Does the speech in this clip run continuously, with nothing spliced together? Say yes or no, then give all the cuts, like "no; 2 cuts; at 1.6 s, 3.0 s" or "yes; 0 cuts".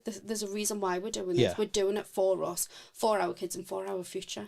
yes; 0 cuts